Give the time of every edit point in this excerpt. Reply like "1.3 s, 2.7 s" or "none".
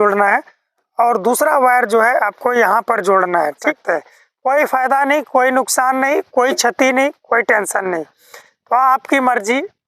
3.8 s